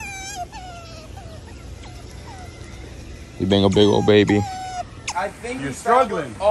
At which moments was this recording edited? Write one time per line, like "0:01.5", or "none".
0:05.0